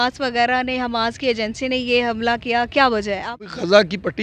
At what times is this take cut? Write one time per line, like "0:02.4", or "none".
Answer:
0:03.0